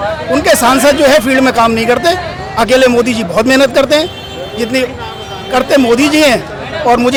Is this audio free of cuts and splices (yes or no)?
yes